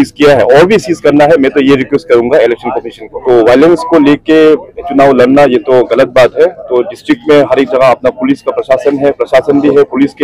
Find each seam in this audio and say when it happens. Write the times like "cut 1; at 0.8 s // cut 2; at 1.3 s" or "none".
cut 1; at 3.2 s